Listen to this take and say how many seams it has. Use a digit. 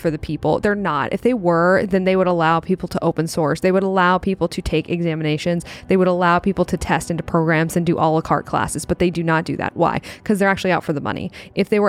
0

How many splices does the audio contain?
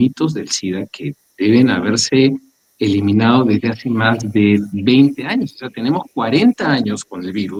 0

